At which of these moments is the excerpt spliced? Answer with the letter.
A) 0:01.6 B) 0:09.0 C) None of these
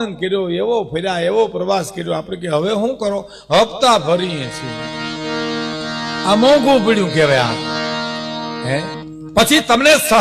B